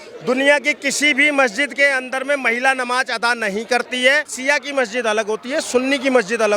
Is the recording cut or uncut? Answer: cut